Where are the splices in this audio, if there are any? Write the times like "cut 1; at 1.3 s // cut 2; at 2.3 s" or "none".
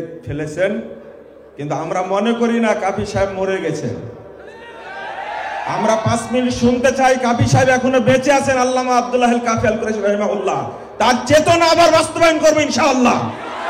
none